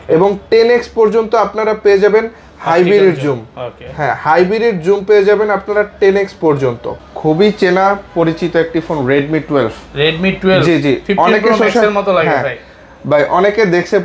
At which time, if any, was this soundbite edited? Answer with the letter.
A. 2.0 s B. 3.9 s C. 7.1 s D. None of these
C